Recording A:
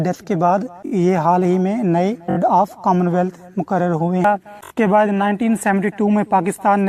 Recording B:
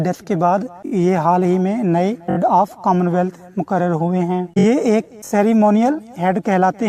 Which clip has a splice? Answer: A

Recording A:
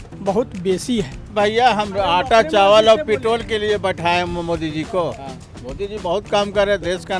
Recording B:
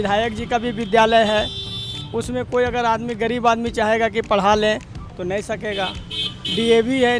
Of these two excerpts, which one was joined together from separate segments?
A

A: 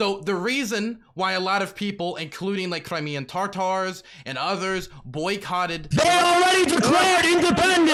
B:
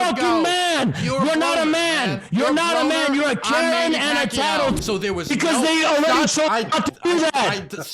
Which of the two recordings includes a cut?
B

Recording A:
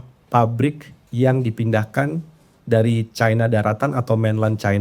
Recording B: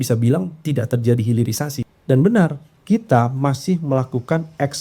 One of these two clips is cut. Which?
B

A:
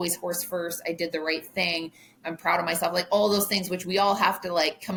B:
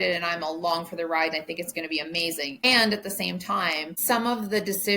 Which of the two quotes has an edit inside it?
B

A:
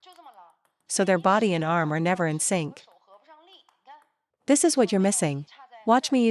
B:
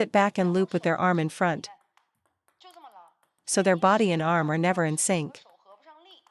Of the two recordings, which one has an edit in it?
B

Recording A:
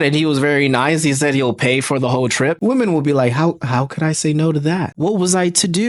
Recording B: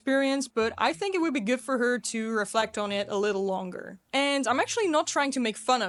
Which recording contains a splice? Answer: A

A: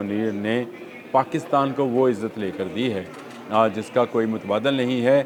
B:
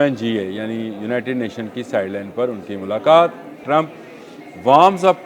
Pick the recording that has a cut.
B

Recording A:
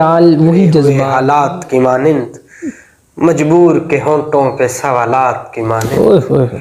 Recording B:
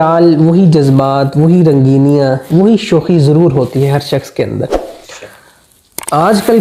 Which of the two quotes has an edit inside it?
A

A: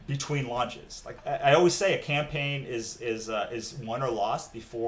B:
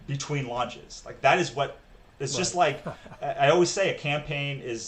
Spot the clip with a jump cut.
A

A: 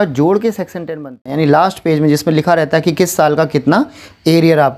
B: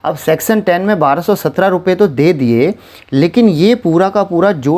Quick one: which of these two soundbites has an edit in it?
A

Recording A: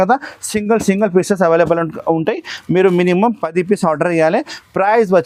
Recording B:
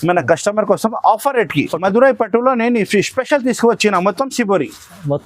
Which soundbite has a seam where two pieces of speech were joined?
B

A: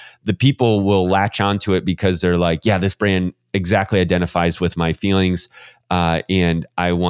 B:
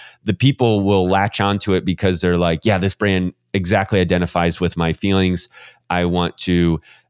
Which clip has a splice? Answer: B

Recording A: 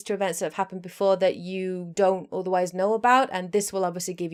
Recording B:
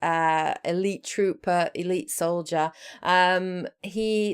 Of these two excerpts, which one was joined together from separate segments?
B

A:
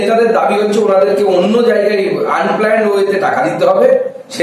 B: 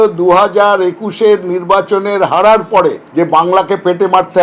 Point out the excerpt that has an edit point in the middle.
B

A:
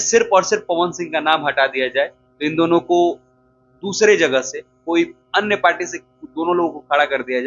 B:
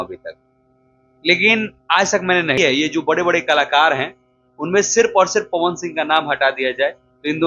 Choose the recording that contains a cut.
B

